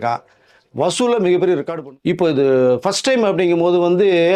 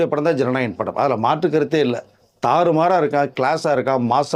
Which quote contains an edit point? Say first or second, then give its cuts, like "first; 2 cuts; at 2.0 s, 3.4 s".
first; 1 cut; at 1.7 s